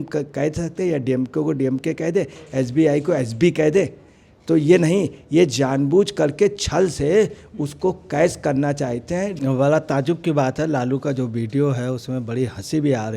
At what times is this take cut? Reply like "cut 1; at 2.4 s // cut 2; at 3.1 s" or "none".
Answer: cut 1; at 9.3 s